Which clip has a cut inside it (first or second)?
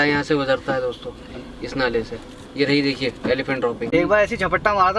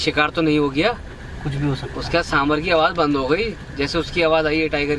first